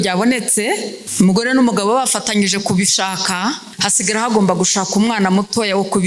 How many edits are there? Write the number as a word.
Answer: two